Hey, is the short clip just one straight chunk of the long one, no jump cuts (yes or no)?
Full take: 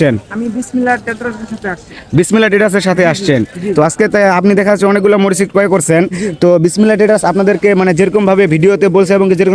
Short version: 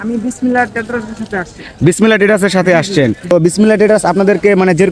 no